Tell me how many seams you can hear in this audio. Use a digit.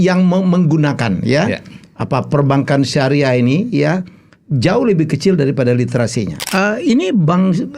1